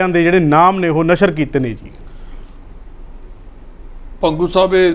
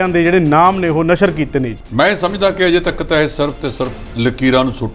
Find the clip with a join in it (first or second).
second